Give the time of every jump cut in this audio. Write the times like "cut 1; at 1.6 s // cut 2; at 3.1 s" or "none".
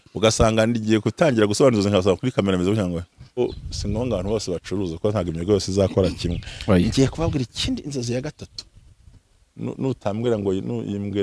cut 1; at 3.4 s